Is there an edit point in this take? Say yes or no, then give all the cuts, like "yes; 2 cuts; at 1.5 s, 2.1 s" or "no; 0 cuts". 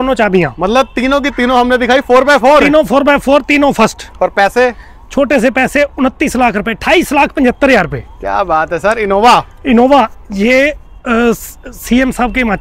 no; 0 cuts